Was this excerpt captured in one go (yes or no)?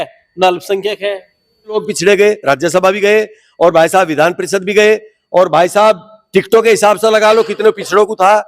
no